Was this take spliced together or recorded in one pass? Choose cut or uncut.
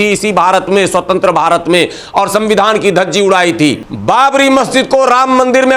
cut